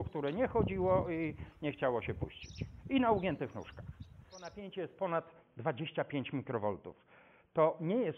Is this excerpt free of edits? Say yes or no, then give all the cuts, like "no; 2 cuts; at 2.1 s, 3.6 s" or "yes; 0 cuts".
no; 1 cut; at 4.5 s